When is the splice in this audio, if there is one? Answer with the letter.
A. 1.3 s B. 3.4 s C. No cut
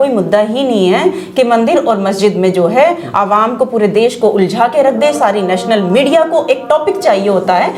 C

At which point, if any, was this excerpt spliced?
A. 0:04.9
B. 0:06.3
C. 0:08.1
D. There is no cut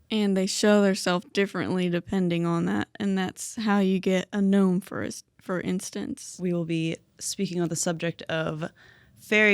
B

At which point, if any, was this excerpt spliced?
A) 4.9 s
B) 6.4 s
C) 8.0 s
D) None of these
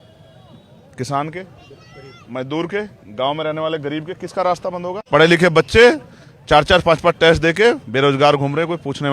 A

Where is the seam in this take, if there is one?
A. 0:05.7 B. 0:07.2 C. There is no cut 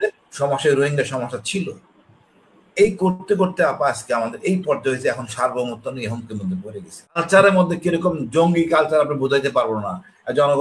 B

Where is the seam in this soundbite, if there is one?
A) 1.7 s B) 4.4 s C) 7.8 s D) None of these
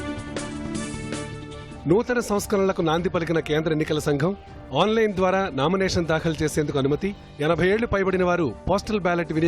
A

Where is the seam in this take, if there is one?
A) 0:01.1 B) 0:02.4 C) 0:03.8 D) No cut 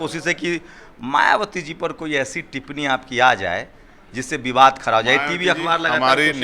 D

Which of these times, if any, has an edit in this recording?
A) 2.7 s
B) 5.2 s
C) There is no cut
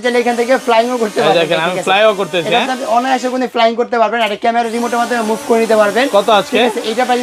C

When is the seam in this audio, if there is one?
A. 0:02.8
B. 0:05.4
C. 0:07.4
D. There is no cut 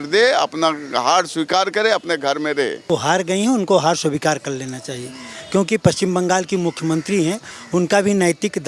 A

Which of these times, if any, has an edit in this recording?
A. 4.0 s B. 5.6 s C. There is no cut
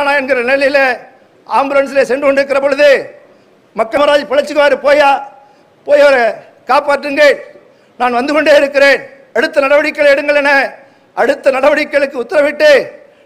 A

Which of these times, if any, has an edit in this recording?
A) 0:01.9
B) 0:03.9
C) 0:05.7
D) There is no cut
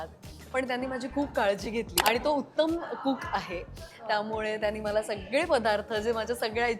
A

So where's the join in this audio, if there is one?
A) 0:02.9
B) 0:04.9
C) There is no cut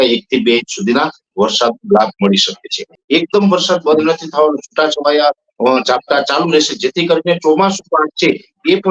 A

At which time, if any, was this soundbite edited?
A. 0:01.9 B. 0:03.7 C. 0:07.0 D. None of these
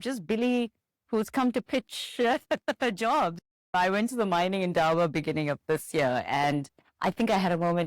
B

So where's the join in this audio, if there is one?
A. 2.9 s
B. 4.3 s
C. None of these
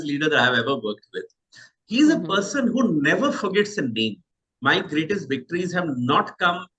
B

